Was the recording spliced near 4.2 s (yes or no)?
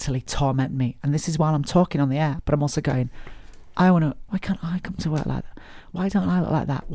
yes